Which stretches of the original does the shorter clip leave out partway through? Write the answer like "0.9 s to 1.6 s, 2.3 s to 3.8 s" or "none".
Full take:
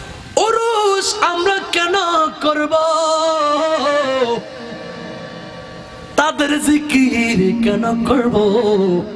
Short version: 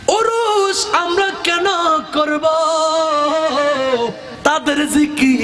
4.5 s to 6.0 s